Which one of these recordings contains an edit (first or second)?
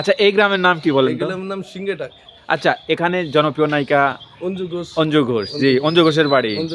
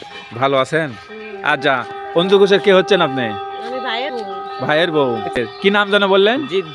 second